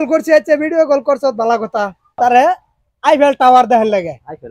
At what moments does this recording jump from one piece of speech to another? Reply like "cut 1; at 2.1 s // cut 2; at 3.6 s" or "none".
none